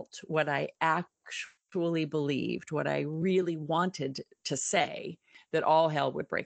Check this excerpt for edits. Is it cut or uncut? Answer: cut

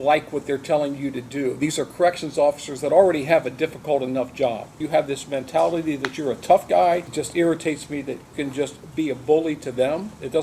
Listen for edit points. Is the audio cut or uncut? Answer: cut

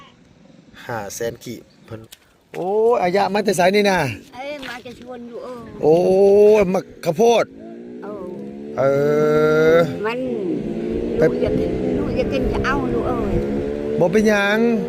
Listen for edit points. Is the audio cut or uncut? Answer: cut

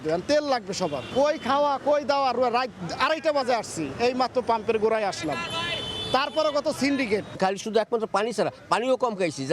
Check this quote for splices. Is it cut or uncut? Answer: uncut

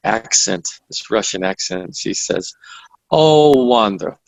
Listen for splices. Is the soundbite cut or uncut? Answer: uncut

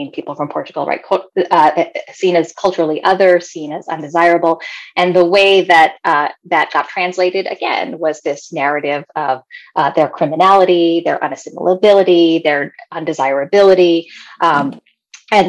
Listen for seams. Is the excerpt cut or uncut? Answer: uncut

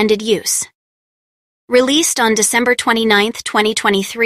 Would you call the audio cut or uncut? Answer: uncut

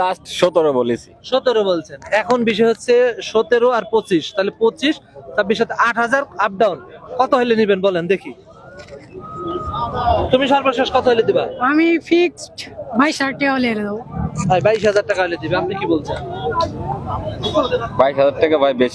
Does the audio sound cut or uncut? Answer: uncut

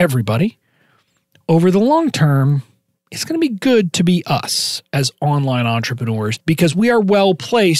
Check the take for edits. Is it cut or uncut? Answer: cut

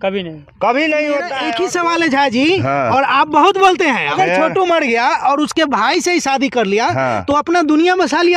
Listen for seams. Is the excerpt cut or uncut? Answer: cut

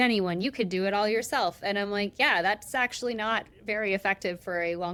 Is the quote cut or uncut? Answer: uncut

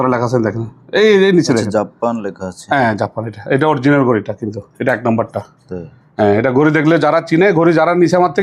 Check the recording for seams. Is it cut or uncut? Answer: uncut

